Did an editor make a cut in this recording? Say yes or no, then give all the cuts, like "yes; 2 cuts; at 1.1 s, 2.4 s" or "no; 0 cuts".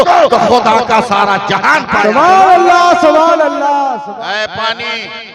yes; 1 cut; at 4.0 s